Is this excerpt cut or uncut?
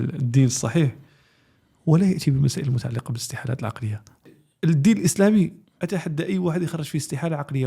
cut